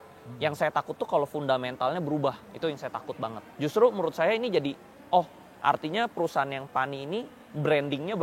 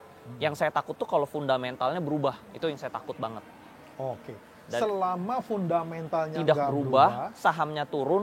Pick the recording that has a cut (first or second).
first